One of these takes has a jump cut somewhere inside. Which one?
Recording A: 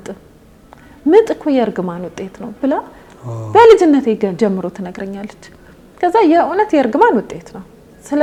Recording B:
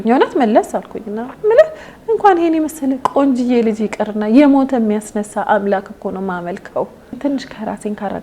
B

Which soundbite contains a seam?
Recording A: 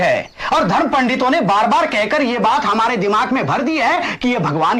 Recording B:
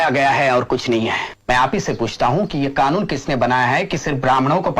B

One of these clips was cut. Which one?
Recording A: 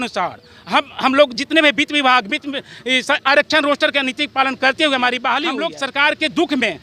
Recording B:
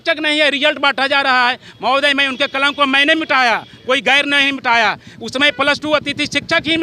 A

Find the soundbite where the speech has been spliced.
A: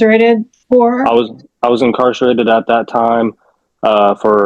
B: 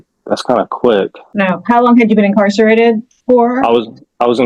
B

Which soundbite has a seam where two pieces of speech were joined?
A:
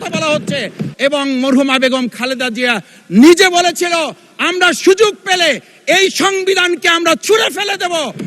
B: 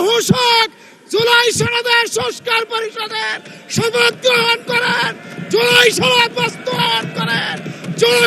A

